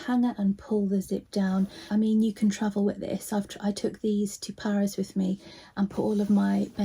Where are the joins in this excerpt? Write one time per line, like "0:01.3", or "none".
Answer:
0:01.8